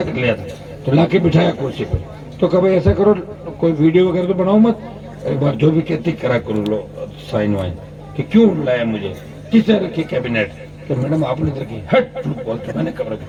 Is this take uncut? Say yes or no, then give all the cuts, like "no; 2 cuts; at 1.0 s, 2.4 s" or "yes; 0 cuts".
yes; 0 cuts